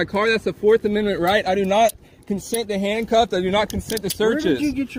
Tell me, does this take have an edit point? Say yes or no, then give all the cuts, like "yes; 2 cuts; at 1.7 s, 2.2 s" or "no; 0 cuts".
no; 0 cuts